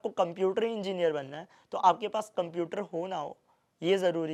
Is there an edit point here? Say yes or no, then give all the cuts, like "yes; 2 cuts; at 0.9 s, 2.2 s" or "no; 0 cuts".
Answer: no; 0 cuts